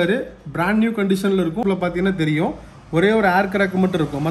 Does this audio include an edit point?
yes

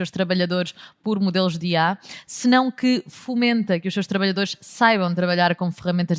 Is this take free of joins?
yes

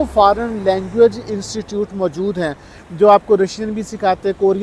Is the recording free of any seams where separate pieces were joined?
yes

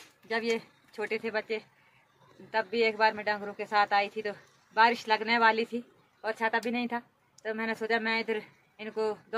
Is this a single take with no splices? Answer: yes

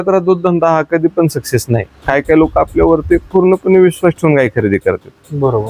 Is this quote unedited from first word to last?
no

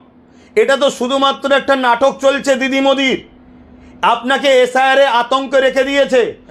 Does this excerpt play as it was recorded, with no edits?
yes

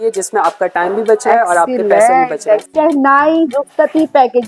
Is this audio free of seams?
no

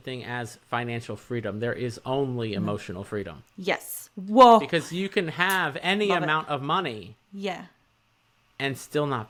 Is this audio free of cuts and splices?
yes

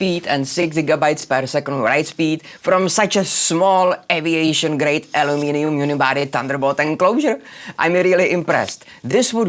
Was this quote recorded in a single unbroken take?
yes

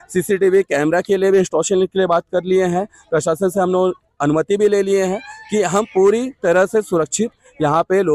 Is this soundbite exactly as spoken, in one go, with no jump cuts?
yes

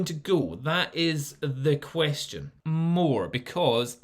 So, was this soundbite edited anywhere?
yes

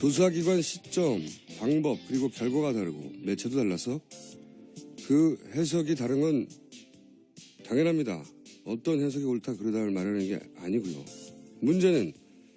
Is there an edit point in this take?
yes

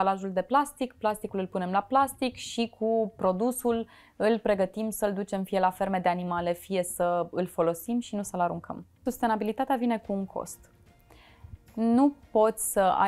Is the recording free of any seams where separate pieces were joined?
no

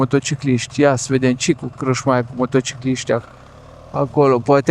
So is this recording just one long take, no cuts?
yes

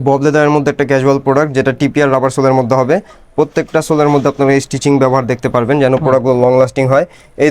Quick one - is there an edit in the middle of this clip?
no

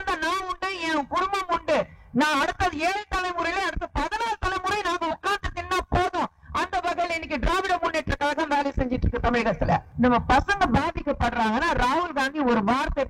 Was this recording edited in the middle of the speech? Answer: yes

